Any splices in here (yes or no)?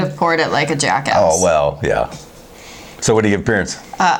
no